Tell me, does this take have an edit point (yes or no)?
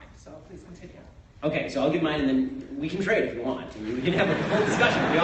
yes